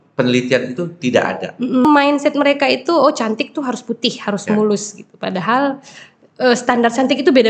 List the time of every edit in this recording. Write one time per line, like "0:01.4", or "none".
0:01.8